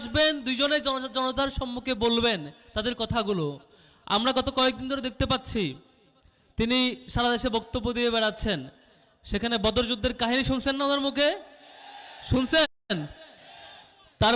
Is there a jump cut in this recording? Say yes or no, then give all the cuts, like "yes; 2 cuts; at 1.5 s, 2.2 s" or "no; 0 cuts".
no; 0 cuts